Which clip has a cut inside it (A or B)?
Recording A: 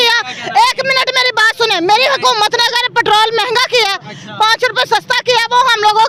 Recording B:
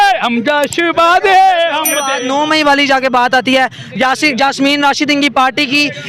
B